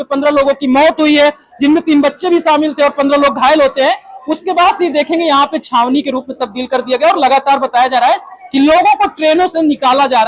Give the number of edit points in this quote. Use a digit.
0